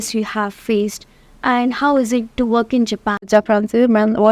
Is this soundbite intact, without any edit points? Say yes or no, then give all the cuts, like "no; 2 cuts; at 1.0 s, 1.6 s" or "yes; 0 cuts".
no; 1 cut; at 3.3 s